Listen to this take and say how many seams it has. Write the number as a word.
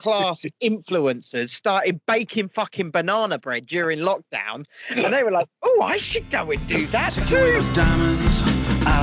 one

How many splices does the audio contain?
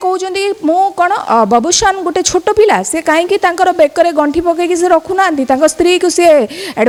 zero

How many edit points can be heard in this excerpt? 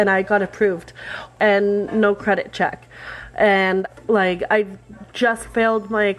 two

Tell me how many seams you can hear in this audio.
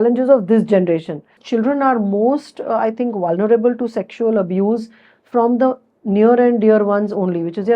one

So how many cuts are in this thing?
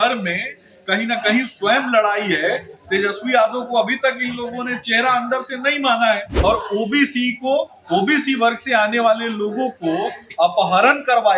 one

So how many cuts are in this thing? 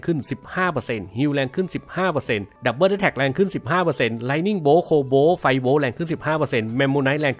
zero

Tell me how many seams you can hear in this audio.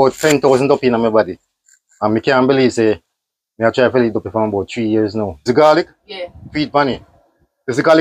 one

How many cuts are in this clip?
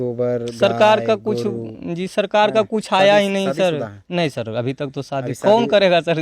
zero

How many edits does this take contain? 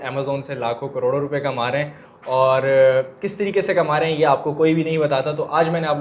zero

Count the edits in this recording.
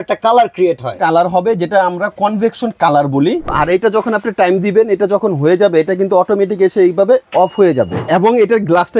two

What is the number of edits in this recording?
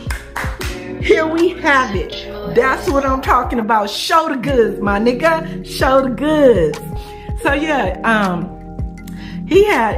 zero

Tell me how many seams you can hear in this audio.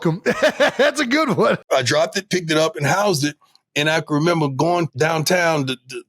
two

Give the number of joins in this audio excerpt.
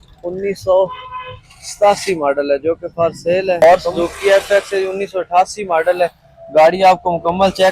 one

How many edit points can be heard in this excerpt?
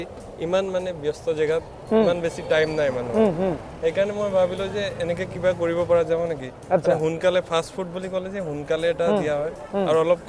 zero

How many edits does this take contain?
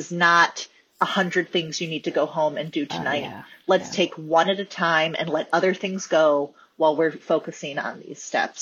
zero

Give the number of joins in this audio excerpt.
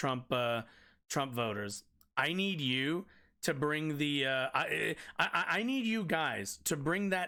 zero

